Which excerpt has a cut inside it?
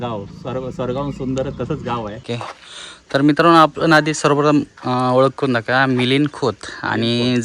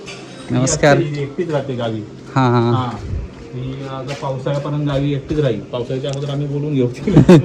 first; 1 cut; at 2.4 s

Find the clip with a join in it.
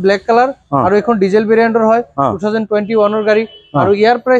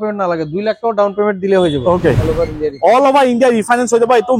second; 1 cut; at 2.2 s

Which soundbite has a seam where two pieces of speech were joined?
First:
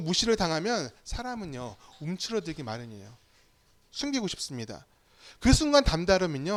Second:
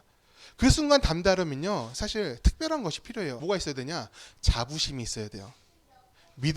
second; 1 cut; at 3.4 s

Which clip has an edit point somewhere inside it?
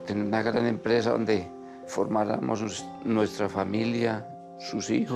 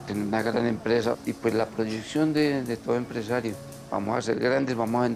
second; 1 cut; at 1.2 s

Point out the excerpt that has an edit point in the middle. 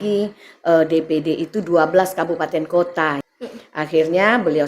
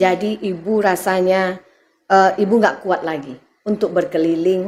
first; 1 cut; at 3.2 s

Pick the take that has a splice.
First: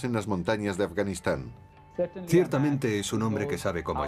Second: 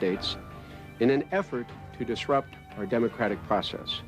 second; 1 cut; at 2.8 s

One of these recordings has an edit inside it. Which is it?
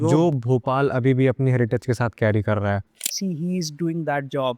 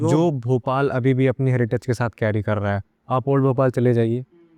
first; 1 cut; at 2.9 s

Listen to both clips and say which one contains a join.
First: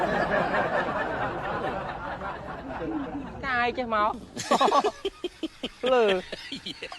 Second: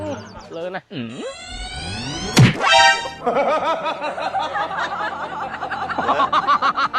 first; 1 cut; at 3.4 s

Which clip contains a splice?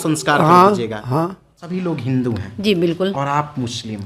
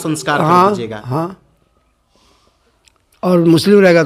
first; 1 cut; at 1.6 s

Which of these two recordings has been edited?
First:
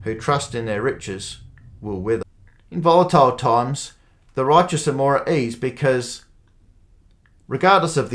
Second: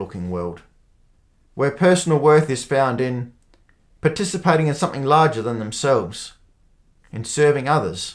first; 1 cut; at 2.2 s

